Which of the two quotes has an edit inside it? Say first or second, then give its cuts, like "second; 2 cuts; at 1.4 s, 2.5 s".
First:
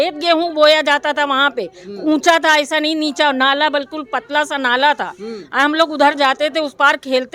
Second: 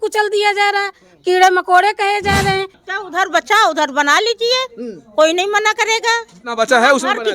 second; 1 cut; at 2.8 s